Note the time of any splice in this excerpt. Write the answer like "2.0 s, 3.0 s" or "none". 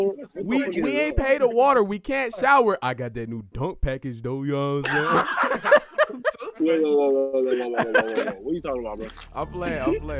none